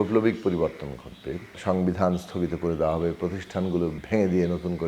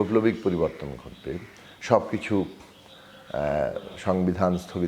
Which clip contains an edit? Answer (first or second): first